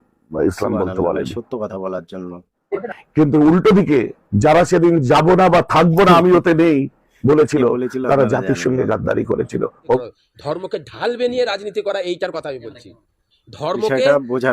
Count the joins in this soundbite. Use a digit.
2